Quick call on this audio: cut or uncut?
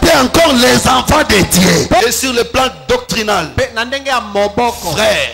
cut